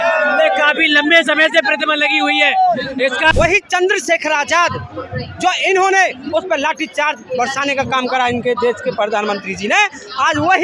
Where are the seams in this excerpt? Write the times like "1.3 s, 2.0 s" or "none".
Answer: 3.3 s